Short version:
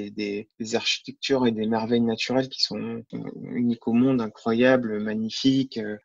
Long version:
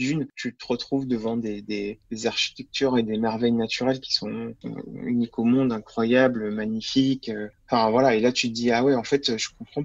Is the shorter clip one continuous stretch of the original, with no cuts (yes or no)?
yes